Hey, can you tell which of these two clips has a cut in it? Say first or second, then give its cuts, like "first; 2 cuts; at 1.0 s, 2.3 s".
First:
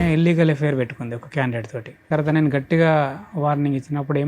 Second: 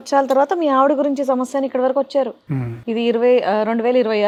first; 1 cut; at 2.1 s